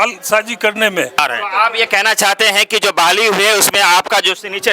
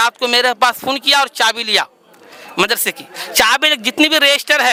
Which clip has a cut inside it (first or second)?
first